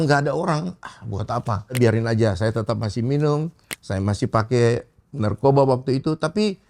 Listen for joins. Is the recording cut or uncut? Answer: cut